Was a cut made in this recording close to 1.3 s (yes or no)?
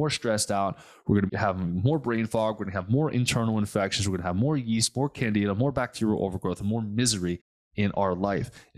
yes